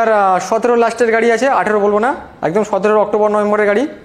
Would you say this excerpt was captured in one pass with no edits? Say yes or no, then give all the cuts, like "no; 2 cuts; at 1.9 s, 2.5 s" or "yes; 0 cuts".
yes; 0 cuts